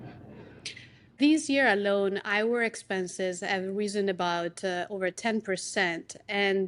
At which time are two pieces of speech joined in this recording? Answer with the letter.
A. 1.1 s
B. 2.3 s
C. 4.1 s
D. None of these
A